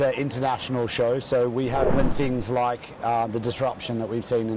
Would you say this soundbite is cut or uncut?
cut